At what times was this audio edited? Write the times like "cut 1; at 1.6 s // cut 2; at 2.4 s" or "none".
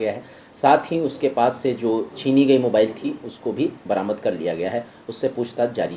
none